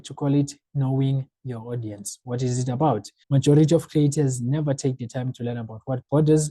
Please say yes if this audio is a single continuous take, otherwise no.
no